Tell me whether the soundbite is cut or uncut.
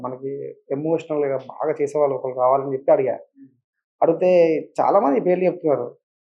uncut